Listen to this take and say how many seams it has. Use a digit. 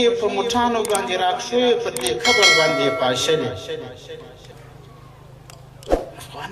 1